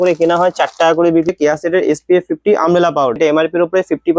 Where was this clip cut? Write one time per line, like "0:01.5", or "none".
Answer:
0:01.3
0:03.2